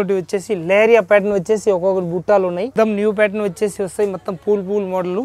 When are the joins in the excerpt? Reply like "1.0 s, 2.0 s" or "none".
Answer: 2.7 s